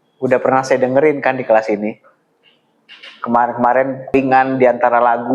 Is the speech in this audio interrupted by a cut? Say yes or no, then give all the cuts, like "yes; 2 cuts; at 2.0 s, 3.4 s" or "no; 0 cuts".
yes; 1 cut; at 4.1 s